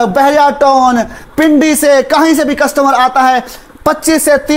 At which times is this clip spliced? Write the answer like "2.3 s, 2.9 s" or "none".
none